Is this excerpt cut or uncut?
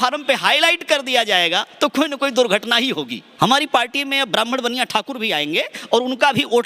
cut